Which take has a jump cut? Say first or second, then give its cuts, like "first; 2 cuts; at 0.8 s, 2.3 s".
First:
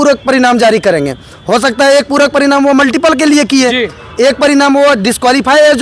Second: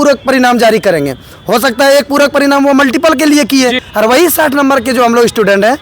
second; 1 cut; at 3.8 s